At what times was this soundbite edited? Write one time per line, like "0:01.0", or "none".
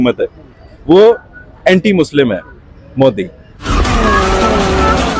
0:03.7